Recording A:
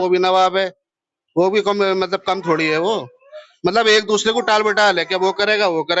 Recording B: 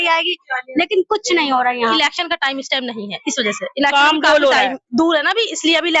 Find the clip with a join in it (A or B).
B